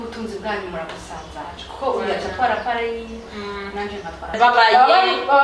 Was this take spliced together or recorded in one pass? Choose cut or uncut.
cut